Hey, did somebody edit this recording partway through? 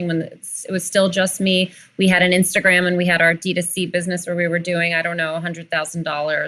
no; 0 cuts

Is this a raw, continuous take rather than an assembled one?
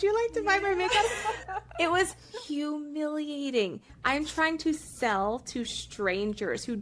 no; 1 cut; at 3.9 s

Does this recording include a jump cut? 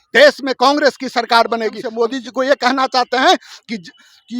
yes; 1 cut; at 1.8 s

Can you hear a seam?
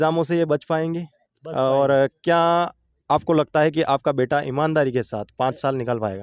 no; 0 cuts

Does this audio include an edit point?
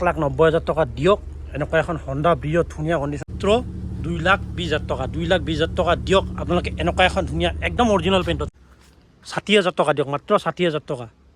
yes; 2 cuts; at 3.2 s, 8.5 s

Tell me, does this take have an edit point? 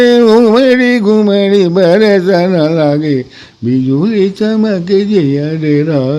no; 0 cuts

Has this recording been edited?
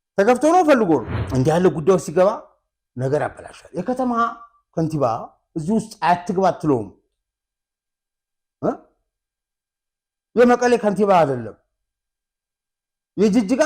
yes; 1 cut; at 1.2 s

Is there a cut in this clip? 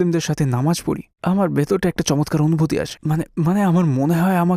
no; 0 cuts

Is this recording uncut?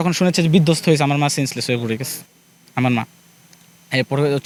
yes; 0 cuts

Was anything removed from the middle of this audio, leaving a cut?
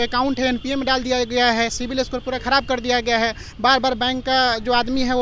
no; 0 cuts

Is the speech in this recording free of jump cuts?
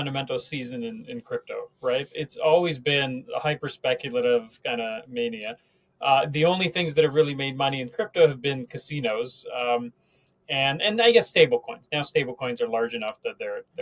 yes; 0 cuts

